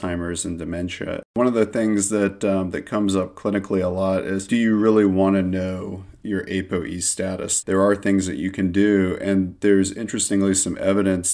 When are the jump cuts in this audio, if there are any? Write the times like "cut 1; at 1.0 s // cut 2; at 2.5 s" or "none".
cut 1; at 1.3 s // cut 2; at 7.6 s